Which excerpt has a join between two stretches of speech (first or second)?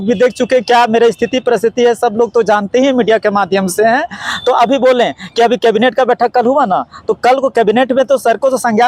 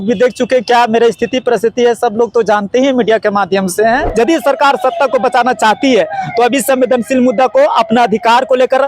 second